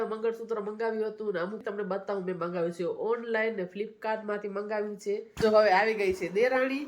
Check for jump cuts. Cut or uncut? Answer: cut